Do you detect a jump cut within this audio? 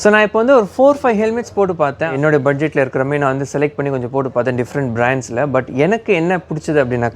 yes; 1 cut; at 2.1 s

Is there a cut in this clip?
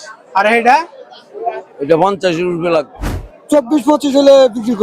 yes; 1 cut; at 3.0 s

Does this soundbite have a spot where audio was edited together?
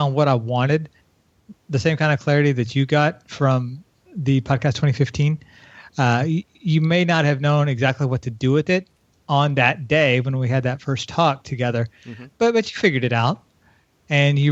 no; 0 cuts

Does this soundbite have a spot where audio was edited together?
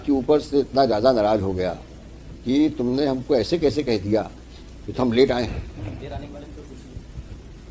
no; 0 cuts

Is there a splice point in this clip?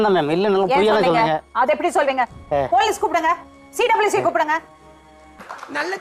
no; 0 cuts

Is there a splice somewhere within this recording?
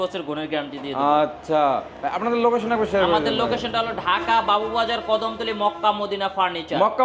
no; 0 cuts

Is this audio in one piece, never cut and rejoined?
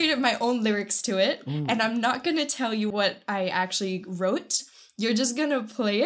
no; 1 cut; at 2.9 s

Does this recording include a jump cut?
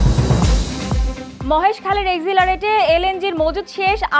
yes; 1 cut; at 1.3 s

